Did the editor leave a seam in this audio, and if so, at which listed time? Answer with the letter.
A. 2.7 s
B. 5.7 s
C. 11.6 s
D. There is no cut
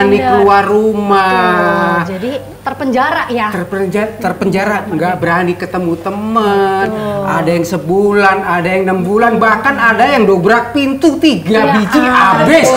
D